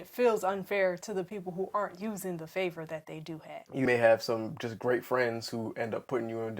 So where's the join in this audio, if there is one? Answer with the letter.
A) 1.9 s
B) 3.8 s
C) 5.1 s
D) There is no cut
B